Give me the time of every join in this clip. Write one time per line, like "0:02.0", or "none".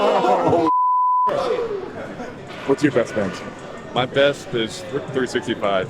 0:02.5

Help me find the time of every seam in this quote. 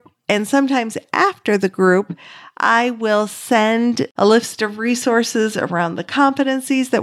none

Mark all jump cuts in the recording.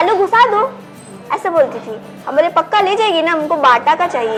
none

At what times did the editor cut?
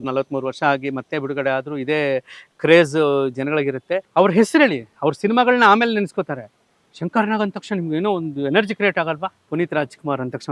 0:04.1
0:09.4

